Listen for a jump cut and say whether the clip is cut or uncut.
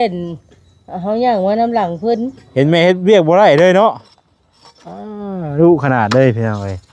cut